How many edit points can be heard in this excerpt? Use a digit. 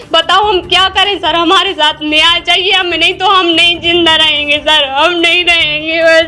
0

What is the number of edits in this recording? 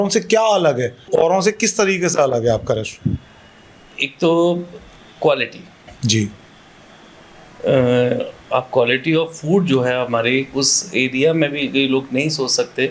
1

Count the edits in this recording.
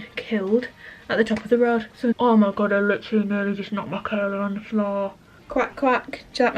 2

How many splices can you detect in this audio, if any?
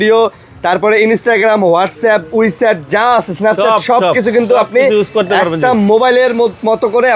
0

